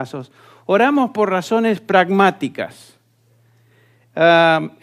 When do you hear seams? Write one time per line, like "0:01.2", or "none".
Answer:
none